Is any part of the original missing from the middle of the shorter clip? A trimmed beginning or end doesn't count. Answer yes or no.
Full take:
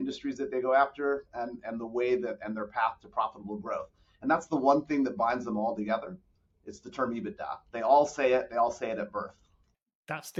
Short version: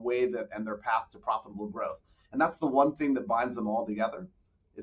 no